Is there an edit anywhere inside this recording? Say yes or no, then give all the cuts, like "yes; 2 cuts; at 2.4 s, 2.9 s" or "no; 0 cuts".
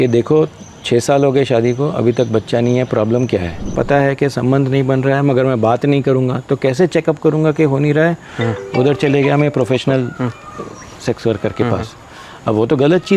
yes; 1 cut; at 3.7 s